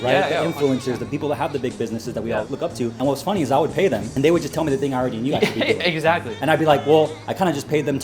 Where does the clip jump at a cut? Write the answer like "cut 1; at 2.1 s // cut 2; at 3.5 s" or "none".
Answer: cut 1; at 1.0 s // cut 2; at 2.7 s // cut 3; at 4.1 s